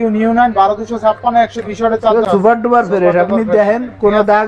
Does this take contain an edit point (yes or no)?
yes